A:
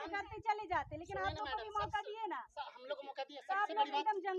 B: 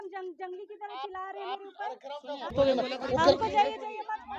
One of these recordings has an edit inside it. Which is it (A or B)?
B